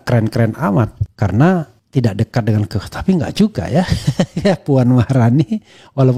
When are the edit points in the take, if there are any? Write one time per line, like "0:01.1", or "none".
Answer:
0:01.0
0:01.8

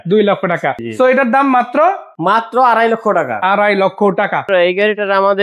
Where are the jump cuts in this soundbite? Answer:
0:00.8
0:02.1
0:04.4

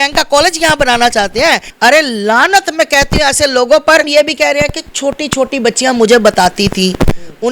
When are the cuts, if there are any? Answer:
0:01.7
0:04.1

